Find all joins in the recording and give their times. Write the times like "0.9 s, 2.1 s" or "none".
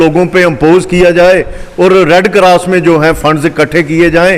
none